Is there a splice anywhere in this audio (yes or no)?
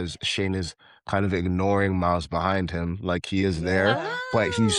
no